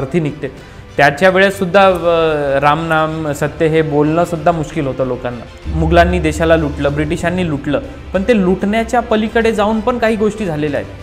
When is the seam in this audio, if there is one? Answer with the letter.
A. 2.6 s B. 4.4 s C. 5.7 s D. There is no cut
C